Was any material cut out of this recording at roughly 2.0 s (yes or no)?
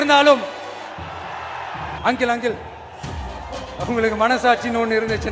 yes